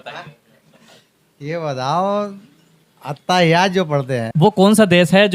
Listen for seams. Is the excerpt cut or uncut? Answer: cut